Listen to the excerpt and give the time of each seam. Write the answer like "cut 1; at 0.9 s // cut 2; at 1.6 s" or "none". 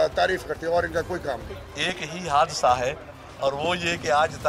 cut 1; at 1.4 s

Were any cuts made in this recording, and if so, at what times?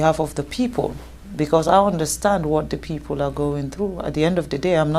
none

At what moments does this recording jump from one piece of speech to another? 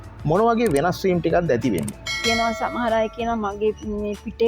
cut 1; at 2.2 s

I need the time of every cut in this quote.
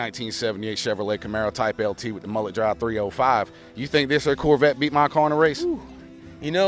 none

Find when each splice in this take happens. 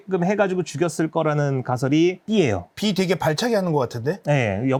none

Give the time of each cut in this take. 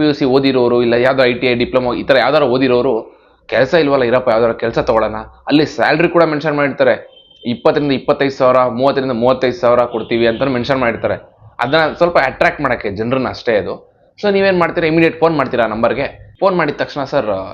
none

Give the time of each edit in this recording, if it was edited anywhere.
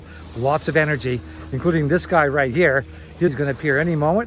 cut 1; at 3.3 s

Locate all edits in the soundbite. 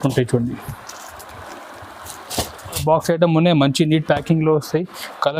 cut 1; at 2.8 s

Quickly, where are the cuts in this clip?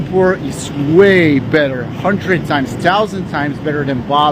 none

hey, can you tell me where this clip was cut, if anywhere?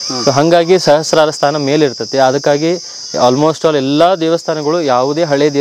none

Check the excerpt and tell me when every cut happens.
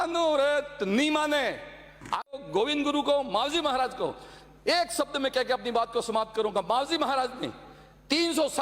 cut 1; at 2.3 s

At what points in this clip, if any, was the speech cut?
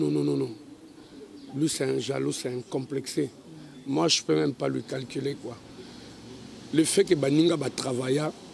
none

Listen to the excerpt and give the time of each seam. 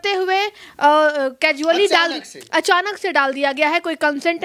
none

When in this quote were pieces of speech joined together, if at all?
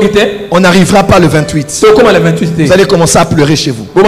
none

